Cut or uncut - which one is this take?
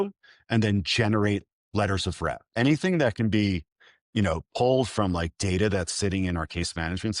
cut